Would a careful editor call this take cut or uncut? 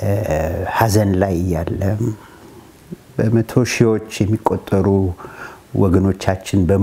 uncut